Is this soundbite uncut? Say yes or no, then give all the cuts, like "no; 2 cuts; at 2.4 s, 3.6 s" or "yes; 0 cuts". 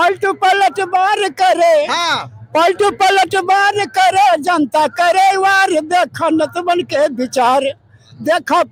yes; 0 cuts